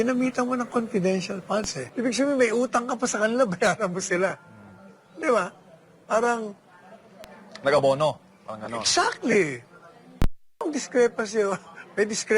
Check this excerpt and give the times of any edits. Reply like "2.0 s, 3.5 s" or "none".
1.8 s